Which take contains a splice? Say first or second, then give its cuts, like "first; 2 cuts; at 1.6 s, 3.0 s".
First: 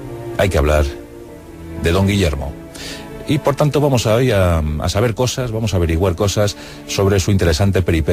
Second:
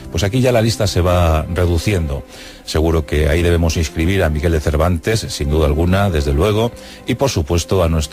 second; 1 cut; at 2.5 s